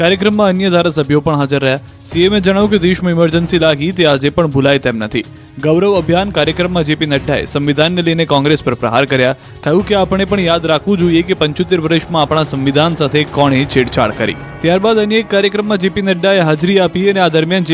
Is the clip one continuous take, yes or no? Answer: yes